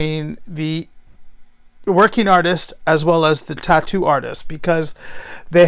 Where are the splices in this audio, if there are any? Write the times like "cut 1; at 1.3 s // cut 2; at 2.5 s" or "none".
none